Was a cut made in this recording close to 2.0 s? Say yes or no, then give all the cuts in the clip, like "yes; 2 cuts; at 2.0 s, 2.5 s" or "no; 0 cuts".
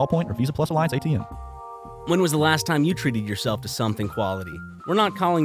yes; 1 cut; at 2.0 s